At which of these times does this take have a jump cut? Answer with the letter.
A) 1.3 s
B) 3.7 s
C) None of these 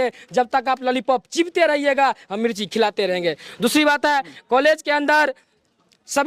C